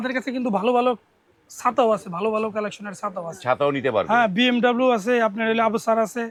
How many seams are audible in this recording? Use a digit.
0